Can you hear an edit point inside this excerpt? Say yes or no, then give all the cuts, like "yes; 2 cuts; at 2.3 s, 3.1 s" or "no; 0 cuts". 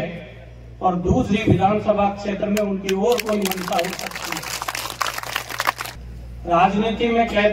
yes; 1 cut; at 5.9 s